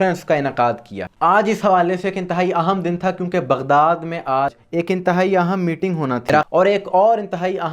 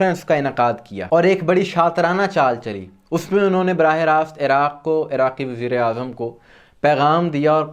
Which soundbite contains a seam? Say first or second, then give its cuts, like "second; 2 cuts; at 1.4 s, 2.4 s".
first; 2 cuts; at 0.9 s, 6.5 s